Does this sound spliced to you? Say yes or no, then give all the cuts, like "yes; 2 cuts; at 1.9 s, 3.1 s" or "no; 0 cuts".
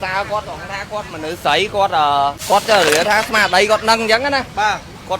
yes; 1 cut; at 2.4 s